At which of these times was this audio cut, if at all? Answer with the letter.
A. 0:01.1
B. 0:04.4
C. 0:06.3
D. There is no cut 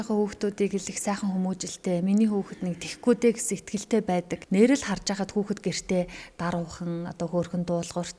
B